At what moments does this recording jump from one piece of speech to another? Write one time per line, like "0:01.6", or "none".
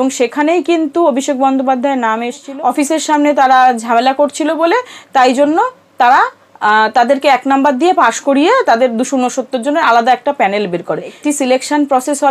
0:02.4
0:11.1